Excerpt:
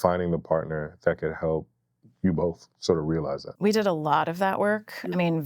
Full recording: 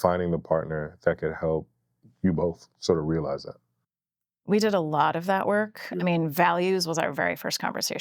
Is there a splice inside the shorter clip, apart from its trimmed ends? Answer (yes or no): yes